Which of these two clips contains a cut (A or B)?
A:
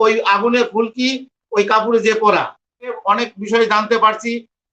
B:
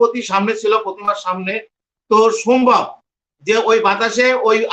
A